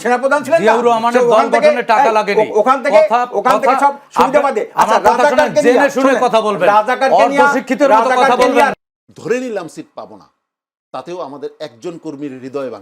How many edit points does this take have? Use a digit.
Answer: 1